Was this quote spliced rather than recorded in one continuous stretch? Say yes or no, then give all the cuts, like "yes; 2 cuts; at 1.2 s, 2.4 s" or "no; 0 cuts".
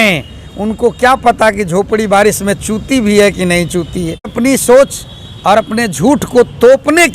yes; 1 cut; at 4.3 s